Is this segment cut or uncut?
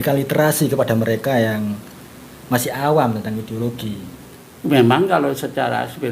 cut